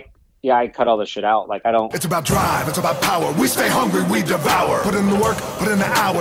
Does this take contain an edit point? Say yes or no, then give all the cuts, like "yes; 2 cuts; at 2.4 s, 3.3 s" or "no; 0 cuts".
yes; 1 cut; at 2.0 s